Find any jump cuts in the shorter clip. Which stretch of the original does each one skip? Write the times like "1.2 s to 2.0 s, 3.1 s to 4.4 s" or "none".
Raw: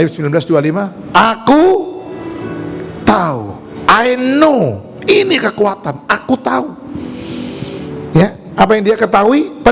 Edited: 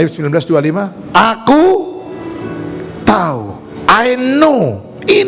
none